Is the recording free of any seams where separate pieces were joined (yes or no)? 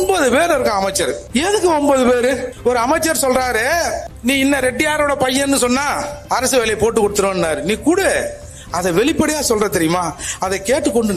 yes